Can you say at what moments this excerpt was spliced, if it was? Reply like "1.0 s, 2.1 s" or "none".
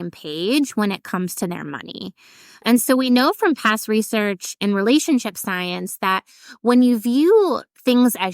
2.6 s